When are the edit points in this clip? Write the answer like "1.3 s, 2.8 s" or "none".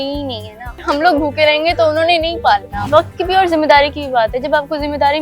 2.8 s